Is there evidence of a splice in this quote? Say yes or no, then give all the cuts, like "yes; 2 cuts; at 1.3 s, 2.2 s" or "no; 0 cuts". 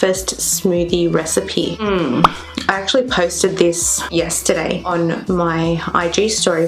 no; 0 cuts